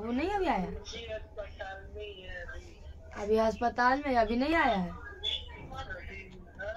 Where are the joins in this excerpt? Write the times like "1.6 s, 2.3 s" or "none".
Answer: none